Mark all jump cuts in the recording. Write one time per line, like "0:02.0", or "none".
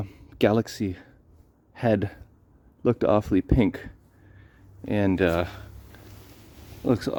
none